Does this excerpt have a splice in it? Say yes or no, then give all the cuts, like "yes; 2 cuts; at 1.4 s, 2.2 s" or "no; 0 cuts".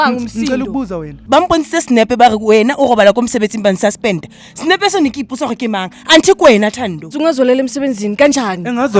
yes; 2 cuts; at 1.2 s, 7.1 s